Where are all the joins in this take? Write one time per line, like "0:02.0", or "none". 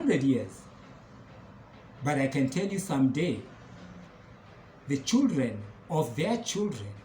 0:04.1